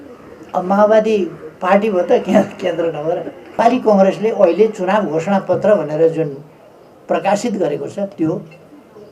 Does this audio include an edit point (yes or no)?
yes